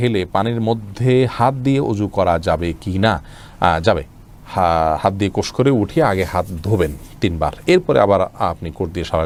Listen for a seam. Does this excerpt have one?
no; 0 cuts

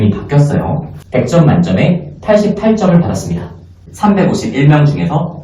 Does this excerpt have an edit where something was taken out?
yes; 2 cuts; at 0.9 s, 3.8 s

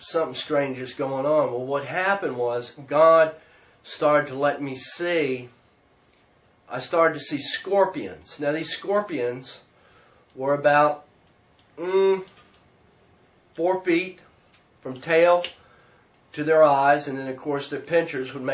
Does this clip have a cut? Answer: yes; 1 cut; at 5.2 s

